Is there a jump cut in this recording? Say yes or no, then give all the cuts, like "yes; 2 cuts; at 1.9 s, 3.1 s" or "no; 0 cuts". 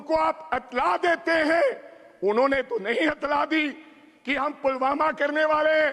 no; 0 cuts